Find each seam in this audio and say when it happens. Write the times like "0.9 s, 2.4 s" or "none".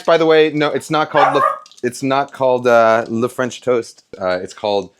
4.1 s